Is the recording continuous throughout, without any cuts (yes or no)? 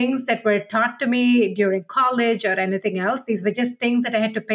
yes